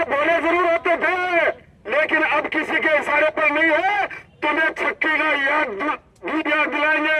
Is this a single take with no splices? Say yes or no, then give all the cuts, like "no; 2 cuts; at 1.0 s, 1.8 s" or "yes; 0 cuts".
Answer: yes; 0 cuts